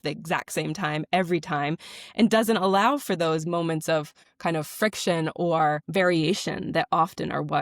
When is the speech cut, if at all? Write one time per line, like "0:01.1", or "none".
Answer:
0:04.2